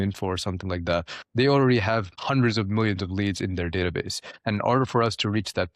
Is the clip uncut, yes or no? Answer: no